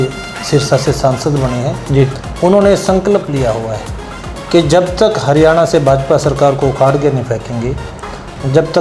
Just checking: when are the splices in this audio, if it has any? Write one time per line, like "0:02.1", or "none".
none